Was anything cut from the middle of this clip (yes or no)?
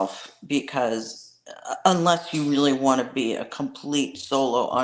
no